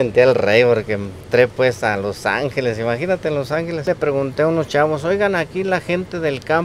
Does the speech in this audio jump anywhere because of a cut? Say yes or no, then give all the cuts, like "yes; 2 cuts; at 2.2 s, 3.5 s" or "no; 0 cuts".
yes; 1 cut; at 3.9 s